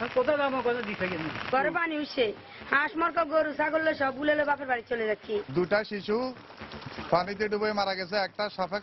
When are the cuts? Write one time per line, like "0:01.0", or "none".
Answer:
0:01.4
0:05.4